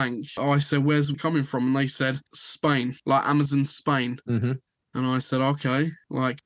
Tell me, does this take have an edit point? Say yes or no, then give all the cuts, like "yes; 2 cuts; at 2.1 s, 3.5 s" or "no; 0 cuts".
no; 0 cuts